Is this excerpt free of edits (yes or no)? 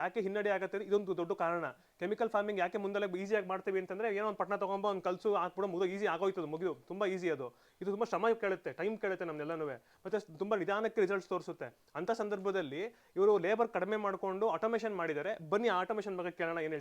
yes